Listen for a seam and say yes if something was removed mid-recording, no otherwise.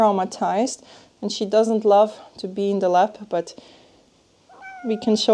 no